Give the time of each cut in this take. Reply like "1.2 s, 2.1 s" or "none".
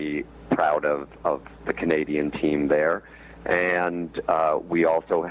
none

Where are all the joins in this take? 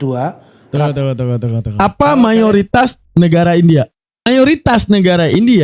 1.6 s, 4.3 s

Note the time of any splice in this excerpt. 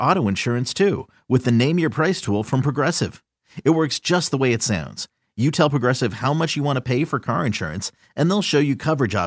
none

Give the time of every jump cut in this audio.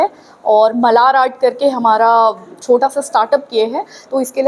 2.5 s

